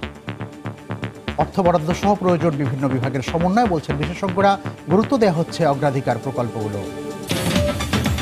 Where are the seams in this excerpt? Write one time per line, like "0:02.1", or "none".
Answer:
none